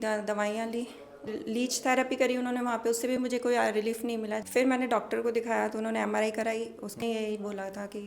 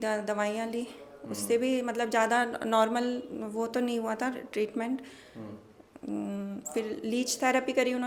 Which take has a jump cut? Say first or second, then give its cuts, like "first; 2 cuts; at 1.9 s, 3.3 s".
first; 3 cuts; at 1.3 s, 4.4 s, 7.0 s